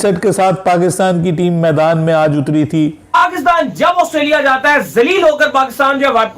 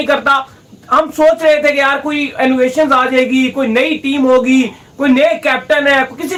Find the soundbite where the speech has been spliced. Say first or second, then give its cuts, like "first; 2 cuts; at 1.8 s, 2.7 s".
first; 1 cut; at 3.2 s